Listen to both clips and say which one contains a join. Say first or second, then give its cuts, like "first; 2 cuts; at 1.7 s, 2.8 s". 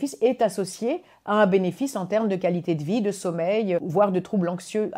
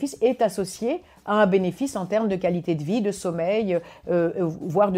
first; 1 cut; at 3.9 s